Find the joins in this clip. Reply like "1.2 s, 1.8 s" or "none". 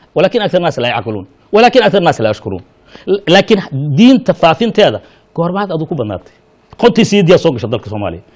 none